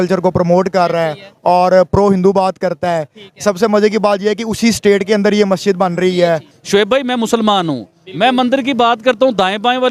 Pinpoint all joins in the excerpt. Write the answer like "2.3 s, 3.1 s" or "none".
6.5 s